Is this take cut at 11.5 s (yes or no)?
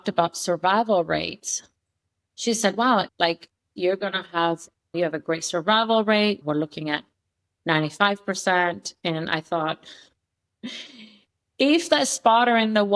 no